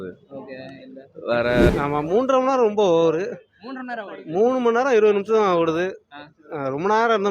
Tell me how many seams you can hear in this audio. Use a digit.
1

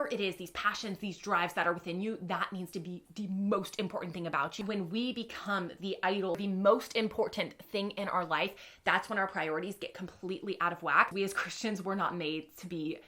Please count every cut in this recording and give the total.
3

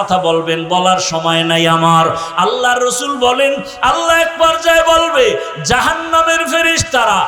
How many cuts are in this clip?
0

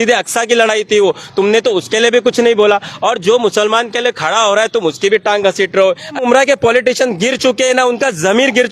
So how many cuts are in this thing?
1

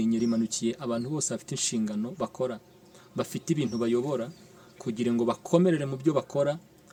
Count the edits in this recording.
0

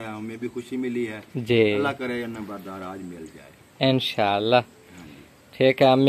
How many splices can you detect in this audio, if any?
0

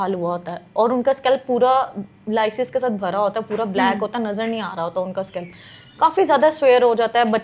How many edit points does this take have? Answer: 0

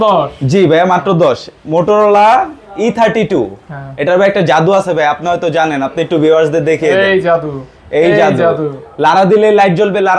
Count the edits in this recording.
0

